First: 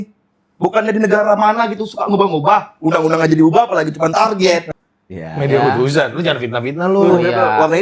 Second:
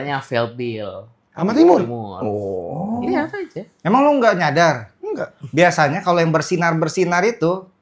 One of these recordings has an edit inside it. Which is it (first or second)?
first